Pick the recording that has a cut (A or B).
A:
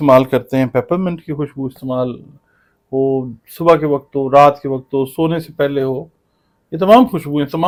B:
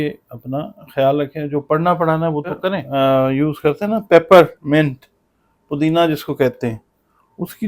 B